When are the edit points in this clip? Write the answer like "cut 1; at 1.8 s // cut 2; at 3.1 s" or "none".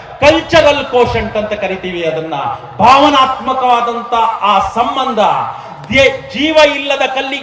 none